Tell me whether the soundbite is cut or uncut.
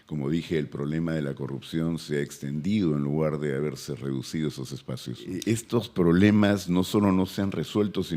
cut